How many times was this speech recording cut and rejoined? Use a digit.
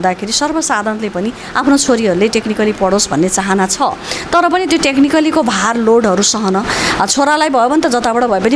0